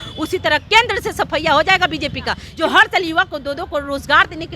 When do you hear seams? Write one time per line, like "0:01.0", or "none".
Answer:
0:02.4